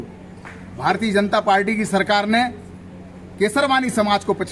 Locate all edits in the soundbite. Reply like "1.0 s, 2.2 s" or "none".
none